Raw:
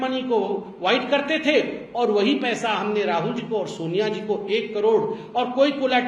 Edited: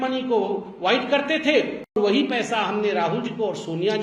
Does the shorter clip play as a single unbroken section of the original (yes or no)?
no